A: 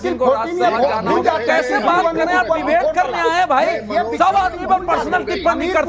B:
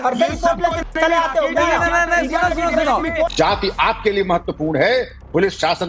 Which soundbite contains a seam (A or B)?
B